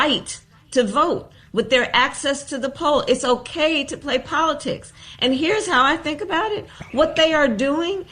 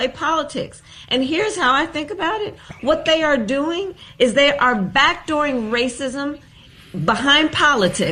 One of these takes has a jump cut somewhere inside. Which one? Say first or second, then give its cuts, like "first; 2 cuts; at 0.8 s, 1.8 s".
first; 1 cut; at 2.0 s